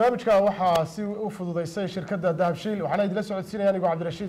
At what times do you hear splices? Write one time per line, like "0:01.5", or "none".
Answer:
none